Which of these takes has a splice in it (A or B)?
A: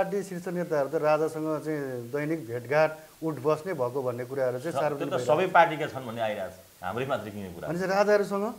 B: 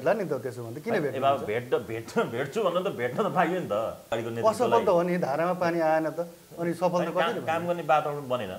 B